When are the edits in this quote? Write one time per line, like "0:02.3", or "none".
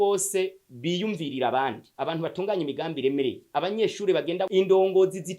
0:04.5